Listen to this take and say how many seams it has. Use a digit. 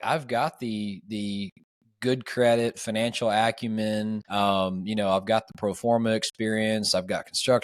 1